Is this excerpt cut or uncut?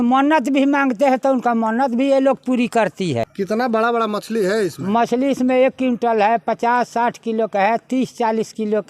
cut